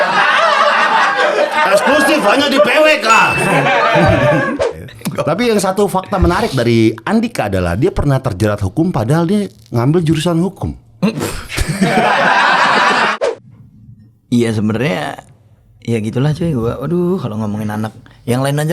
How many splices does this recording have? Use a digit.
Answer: 2